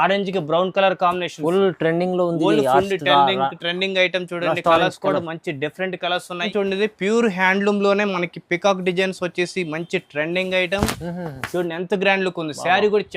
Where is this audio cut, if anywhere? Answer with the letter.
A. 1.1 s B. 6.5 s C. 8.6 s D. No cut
B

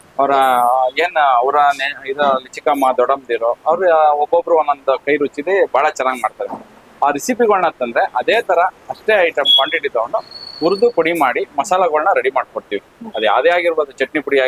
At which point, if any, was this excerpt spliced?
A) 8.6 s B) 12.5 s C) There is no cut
C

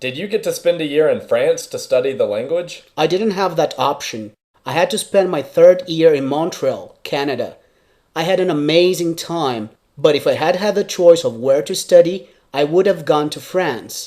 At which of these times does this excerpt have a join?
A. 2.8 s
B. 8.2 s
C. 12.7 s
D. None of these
A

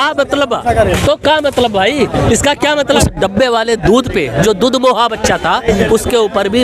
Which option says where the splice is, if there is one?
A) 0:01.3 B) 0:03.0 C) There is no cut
B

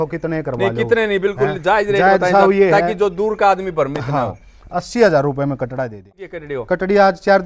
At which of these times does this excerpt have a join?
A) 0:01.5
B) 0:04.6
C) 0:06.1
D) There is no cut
C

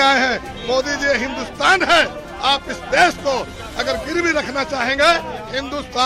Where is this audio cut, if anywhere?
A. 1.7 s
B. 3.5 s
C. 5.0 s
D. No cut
D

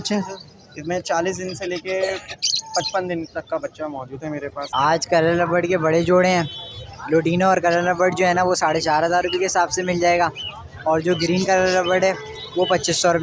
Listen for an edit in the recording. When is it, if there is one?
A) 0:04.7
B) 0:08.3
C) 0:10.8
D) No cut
A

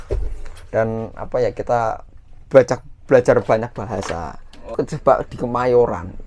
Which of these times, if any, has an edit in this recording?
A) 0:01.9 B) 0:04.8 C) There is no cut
B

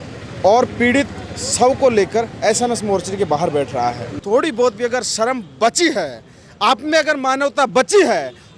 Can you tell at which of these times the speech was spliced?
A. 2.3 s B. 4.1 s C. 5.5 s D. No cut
B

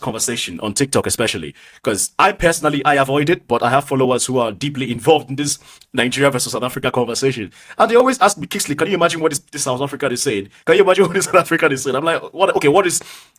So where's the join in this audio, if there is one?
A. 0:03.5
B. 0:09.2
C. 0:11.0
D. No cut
D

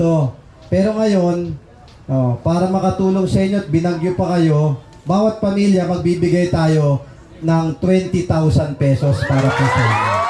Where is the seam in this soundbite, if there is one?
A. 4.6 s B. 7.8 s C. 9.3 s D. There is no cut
D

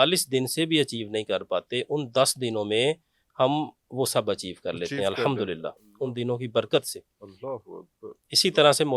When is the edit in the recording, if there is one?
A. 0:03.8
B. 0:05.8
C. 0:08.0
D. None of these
D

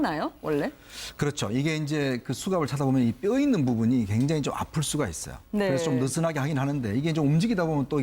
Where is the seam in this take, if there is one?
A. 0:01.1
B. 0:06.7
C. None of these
B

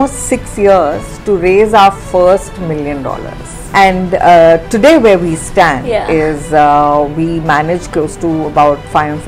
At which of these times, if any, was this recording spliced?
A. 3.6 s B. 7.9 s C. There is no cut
A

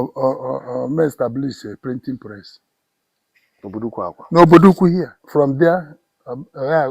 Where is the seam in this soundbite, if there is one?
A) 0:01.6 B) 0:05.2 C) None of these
B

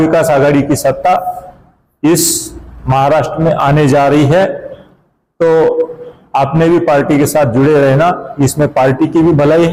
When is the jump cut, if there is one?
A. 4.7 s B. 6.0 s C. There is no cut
C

